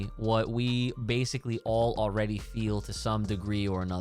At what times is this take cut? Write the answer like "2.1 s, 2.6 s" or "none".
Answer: none